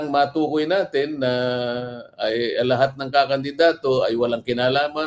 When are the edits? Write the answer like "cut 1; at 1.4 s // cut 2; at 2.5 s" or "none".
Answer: none